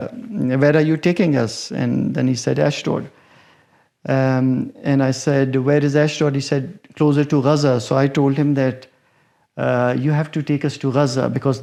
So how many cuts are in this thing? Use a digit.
0